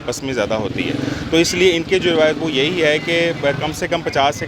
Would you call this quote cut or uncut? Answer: uncut